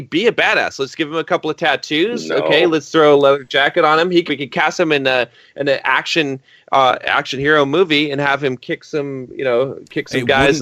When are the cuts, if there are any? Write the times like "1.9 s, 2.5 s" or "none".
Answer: 4.3 s